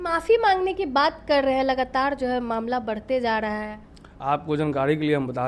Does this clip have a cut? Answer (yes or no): no